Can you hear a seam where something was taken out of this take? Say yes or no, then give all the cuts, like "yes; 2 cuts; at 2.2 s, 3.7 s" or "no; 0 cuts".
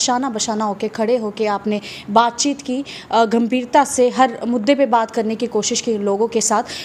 no; 0 cuts